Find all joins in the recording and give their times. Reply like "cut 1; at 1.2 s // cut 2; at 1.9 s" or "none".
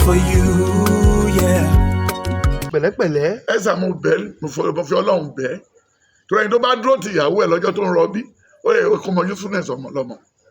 cut 1; at 2.7 s